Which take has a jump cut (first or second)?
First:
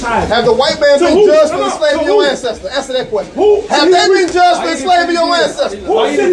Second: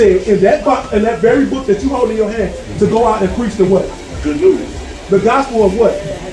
first